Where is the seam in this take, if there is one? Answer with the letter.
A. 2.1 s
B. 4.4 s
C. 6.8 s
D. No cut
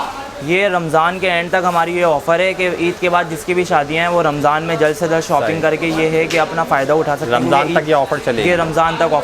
D